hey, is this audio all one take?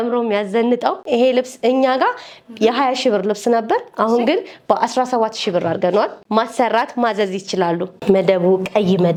yes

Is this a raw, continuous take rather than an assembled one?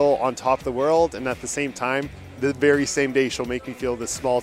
yes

